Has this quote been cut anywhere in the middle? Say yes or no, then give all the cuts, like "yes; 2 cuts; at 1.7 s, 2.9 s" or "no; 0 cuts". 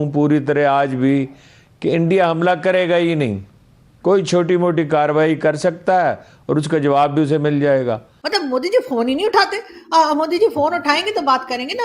yes; 1 cut; at 8.1 s